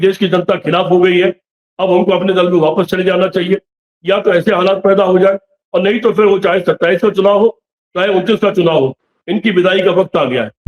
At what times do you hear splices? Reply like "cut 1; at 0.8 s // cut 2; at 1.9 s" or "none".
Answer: none